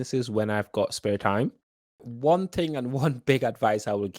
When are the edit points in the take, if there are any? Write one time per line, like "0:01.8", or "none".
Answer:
0:02.1

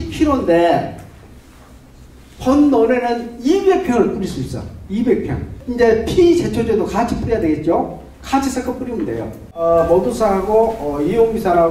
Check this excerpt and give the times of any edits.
0:05.6
0:09.5

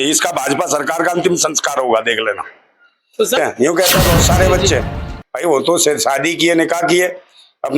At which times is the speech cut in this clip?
0:03.4

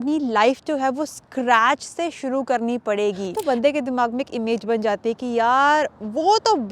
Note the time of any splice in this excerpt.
0:03.3

